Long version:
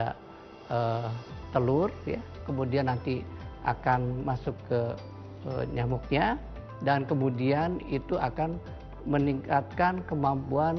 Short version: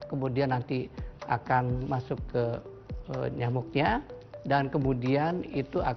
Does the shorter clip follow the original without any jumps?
yes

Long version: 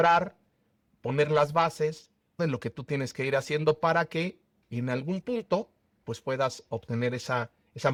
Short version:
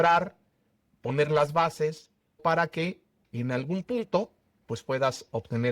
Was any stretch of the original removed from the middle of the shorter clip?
yes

